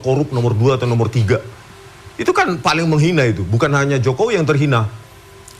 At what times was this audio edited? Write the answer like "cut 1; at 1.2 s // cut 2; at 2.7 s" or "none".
none